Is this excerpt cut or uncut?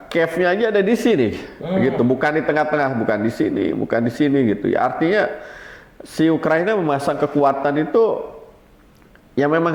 uncut